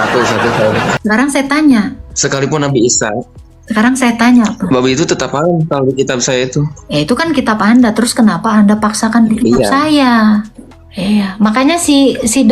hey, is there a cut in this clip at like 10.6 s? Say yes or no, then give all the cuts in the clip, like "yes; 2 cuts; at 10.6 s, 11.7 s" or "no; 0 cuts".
yes; 2 cuts; at 1.0 s, 10.6 s